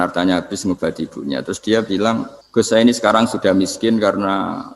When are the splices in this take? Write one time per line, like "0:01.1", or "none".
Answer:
0:02.4

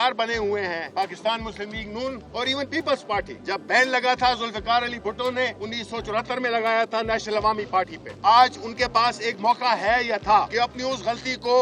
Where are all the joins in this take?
0:01.1
0:02.2
0:03.4
0:05.6
0:08.3
0:10.5

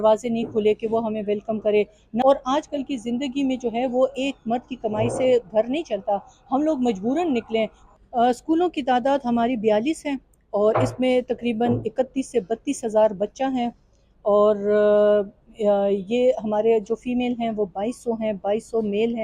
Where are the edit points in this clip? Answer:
0:02.2
0:07.8

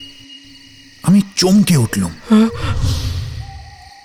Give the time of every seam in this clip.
none

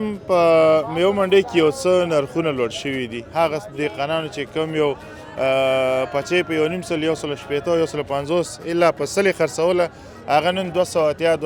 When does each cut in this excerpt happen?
none

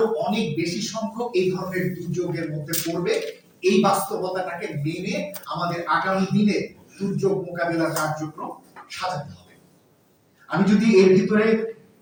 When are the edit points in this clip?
none

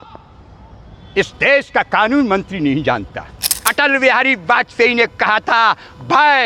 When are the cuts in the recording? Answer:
0:03.6

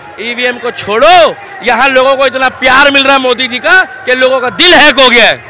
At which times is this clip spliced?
none

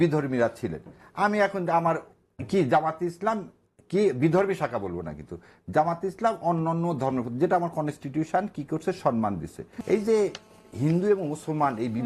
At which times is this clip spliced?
0:09.7

